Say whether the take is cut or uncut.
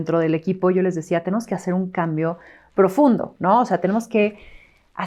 uncut